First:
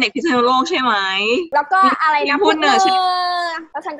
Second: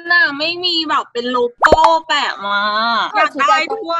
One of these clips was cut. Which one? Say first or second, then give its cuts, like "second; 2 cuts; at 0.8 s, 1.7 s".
second; 1 cut; at 3.1 s